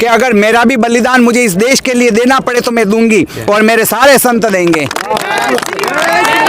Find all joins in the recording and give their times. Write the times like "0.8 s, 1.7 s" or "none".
none